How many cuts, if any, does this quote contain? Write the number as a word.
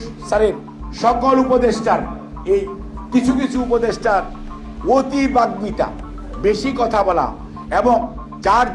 zero